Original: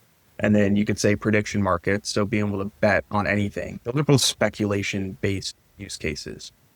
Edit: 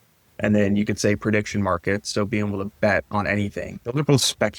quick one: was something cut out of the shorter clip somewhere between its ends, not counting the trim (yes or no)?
no